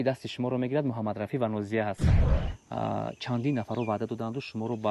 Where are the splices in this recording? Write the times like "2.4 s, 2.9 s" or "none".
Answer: 2.3 s